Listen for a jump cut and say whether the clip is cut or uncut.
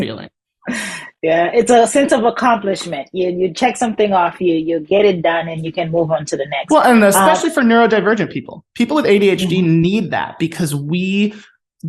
uncut